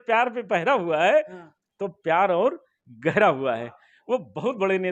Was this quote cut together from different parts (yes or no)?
no